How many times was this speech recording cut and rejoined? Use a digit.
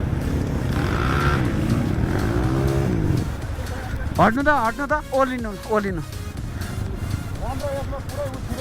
0